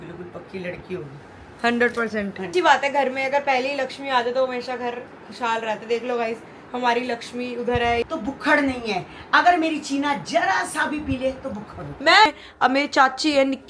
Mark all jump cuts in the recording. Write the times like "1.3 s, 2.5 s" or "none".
2.5 s, 8.0 s, 12.3 s